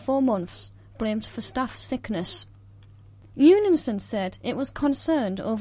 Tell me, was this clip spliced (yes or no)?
no